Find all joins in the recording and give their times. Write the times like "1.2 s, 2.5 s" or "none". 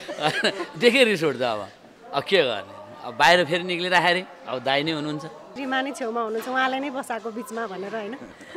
5.5 s